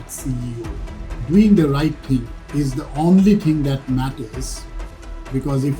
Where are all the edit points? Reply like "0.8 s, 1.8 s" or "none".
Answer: 1.2 s, 2.4 s